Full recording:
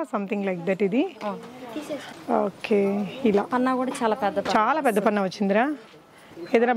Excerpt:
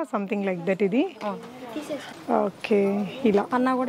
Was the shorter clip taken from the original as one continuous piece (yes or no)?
yes